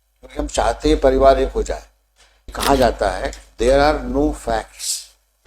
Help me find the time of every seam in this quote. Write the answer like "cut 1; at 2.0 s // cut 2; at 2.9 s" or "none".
cut 1; at 2.5 s